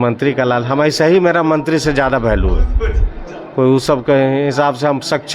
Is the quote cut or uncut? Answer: uncut